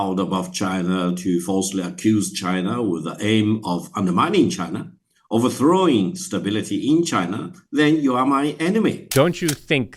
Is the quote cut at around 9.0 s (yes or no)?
yes